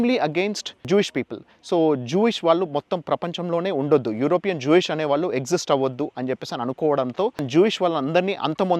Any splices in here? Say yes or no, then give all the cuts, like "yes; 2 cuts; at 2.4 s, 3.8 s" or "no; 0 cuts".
yes; 2 cuts; at 0.9 s, 7.4 s